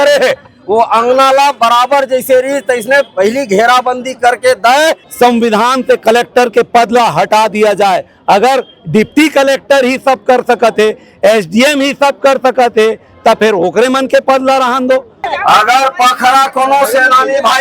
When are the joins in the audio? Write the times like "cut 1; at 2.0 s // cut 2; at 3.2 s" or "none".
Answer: cut 1; at 5.0 s // cut 2; at 15.2 s